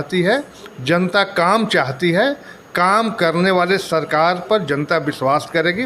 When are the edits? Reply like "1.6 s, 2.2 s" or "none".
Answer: none